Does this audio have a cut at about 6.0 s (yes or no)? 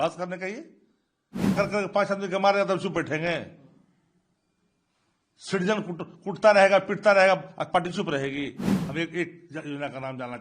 no